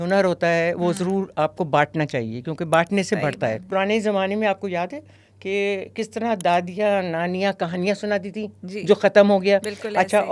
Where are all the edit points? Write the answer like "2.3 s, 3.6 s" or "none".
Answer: 3.6 s